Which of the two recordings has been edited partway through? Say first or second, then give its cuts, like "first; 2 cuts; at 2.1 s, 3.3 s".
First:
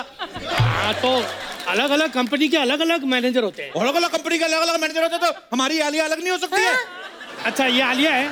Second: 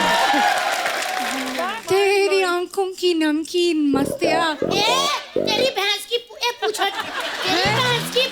second; 1 cut; at 1.7 s